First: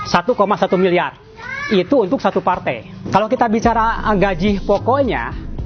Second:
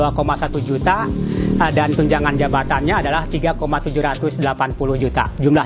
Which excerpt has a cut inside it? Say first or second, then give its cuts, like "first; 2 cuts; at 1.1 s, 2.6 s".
first; 1 cut; at 2.9 s